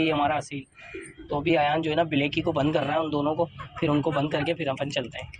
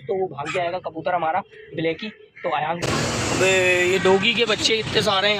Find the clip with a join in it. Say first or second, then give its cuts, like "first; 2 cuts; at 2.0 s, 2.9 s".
second; 1 cut; at 2.8 s